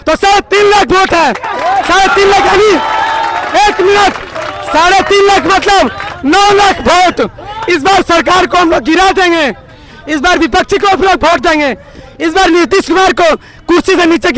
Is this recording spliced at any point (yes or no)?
no